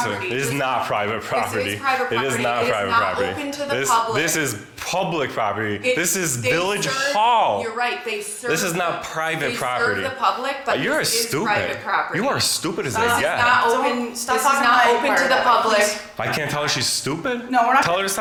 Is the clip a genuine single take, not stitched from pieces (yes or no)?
yes